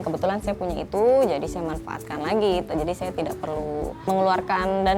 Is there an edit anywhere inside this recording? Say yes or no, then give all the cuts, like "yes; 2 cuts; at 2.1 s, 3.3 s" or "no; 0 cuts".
yes; 1 cut; at 4.1 s